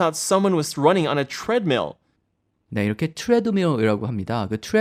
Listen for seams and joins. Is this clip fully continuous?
yes; 0 cuts

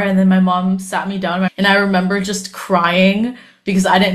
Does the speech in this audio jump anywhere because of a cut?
yes; 1 cut; at 1.5 s

